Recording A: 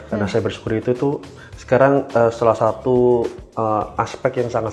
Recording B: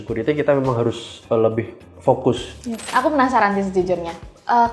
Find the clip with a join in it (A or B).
B